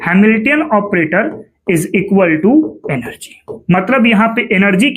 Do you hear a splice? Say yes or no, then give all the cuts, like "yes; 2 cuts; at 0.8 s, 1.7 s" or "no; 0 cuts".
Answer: no; 0 cuts